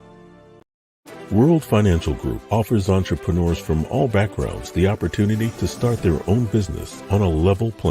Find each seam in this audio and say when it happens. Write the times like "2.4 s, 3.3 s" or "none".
1.1 s